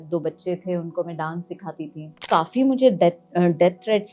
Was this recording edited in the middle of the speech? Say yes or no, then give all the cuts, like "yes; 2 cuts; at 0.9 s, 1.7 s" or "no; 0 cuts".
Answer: yes; 1 cut; at 2.3 s